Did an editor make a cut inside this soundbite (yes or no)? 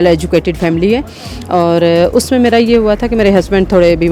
no